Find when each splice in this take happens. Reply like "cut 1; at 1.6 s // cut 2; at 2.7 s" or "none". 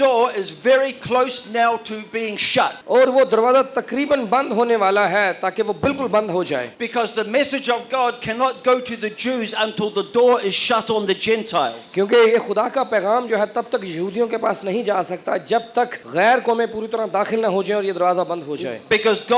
cut 1; at 2.8 s // cut 2; at 6.8 s // cut 3; at 16.0 s